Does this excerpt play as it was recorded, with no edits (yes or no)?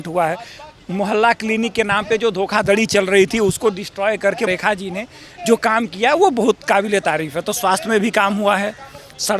no